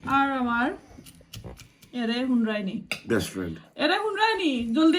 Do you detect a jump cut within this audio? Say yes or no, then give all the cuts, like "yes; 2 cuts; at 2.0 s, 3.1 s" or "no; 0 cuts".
no; 0 cuts